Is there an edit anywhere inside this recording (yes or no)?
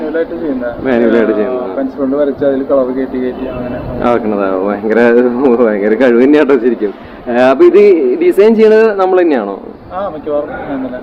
no